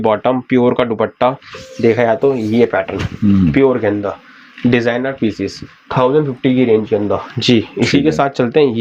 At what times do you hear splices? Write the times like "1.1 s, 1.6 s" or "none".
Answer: none